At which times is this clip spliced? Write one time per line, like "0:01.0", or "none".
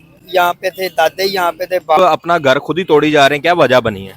0:02.0